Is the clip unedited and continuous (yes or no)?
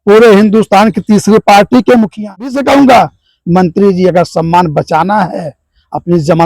no